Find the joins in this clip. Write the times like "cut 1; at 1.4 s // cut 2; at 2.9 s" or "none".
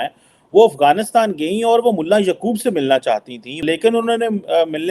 cut 1; at 3.6 s